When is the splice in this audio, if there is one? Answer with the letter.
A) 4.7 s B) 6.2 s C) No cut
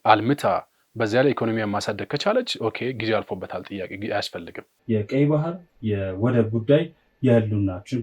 A